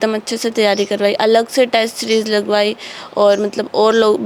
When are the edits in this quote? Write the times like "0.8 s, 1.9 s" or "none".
none